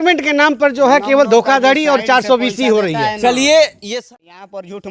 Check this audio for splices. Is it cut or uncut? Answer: cut